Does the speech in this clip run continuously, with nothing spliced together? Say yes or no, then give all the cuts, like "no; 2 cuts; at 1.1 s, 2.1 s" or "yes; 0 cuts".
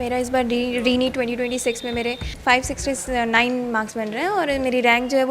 no; 1 cut; at 2.3 s